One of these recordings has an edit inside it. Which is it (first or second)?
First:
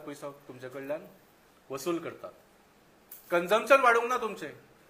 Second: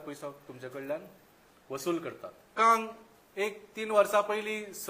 second